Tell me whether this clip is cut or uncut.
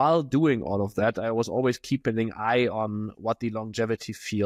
uncut